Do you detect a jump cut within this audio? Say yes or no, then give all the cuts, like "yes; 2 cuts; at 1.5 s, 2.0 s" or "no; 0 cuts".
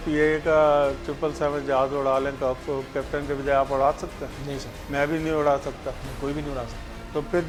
no; 0 cuts